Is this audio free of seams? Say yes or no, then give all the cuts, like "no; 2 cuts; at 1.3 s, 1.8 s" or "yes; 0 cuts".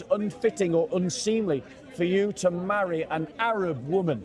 no; 1 cut; at 3.3 s